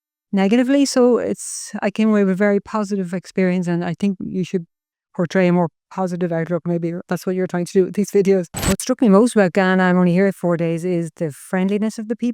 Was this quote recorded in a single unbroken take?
no; 2 cuts; at 4.2 s, 8.7 s

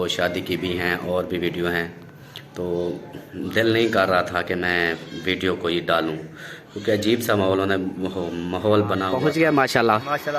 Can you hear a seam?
yes; 1 cut; at 9.1 s

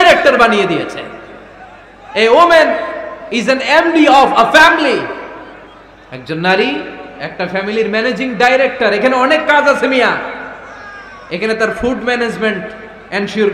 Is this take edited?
no; 0 cuts

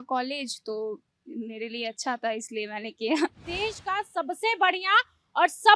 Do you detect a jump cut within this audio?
yes; 1 cut; at 3.4 s

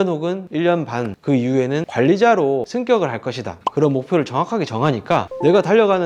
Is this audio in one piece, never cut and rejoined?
yes; 0 cuts

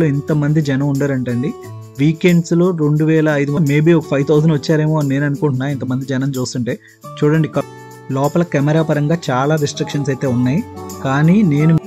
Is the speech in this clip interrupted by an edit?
yes; 2 cuts; at 3.6 s, 7.6 s

